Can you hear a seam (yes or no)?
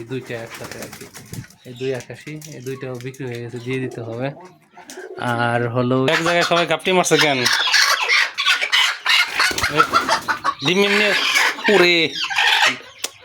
yes